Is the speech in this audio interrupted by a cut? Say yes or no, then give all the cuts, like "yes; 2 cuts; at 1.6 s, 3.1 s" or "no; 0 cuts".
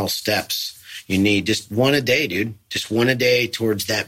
no; 0 cuts